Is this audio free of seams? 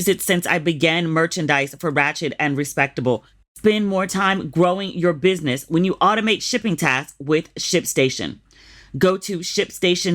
no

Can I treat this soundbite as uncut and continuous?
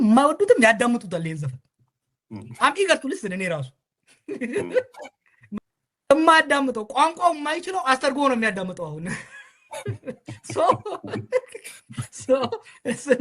no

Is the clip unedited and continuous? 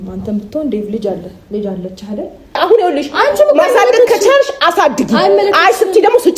no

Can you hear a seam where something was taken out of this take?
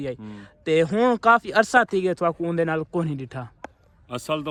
no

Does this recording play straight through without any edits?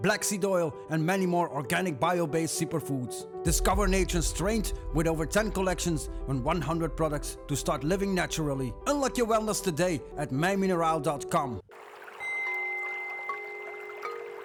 yes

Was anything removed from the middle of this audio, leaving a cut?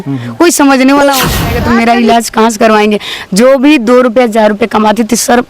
yes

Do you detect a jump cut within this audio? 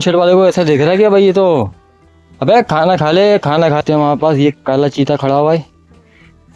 yes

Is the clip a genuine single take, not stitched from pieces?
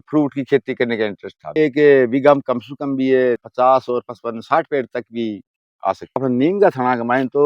no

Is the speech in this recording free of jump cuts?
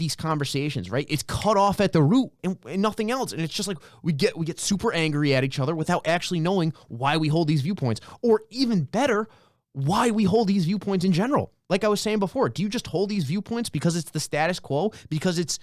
yes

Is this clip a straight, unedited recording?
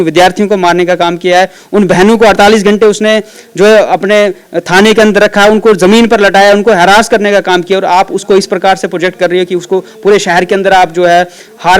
yes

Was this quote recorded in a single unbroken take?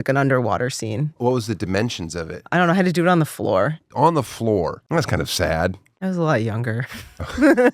no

